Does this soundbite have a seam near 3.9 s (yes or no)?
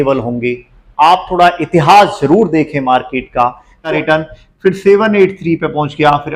yes